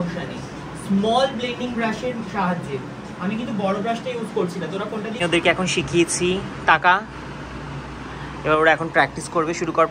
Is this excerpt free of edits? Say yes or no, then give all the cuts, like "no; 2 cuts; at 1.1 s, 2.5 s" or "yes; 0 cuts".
no; 1 cut; at 5.1 s